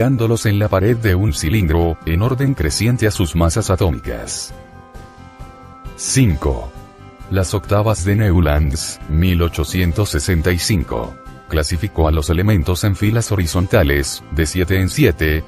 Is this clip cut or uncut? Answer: cut